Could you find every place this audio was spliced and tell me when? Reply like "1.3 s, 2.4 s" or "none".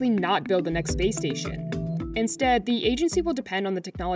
none